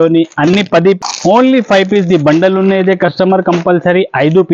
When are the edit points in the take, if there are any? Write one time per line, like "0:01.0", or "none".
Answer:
0:01.0